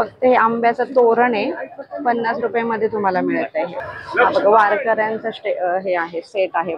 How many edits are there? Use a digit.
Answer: 1